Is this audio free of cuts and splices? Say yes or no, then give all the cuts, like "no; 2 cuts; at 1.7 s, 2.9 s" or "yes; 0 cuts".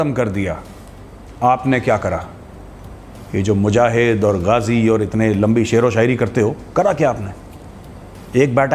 yes; 0 cuts